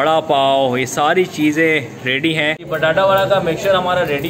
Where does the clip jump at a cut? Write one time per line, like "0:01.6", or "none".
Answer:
0:02.6